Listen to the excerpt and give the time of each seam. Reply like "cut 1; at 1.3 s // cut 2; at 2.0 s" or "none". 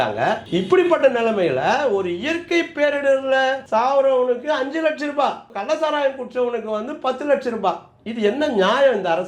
cut 1; at 5.5 s